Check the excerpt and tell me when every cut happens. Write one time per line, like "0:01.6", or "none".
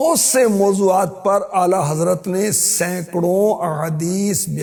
none